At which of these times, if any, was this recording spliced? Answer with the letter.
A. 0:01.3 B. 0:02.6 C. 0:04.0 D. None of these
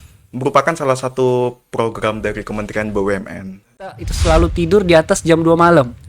C